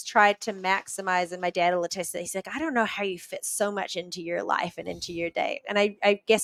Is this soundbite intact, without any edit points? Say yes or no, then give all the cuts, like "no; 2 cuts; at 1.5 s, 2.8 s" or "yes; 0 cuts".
yes; 0 cuts